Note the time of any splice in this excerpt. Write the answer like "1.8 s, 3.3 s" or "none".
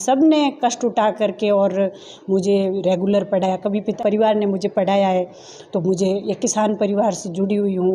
4.0 s